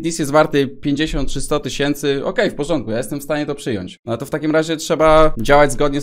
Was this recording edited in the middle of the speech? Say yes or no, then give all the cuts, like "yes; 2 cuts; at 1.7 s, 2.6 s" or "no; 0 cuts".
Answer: yes; 1 cut; at 3.9 s